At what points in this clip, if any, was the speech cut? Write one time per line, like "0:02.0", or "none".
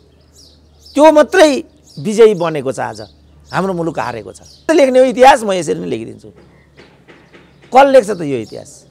0:04.7